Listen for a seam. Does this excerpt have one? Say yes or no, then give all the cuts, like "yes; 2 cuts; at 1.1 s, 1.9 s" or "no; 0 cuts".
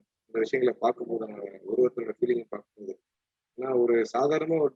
no; 0 cuts